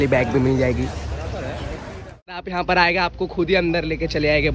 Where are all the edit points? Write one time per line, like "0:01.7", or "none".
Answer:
0:02.4